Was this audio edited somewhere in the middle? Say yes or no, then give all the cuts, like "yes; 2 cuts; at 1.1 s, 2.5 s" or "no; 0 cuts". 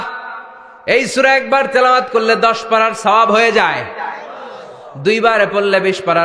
no; 0 cuts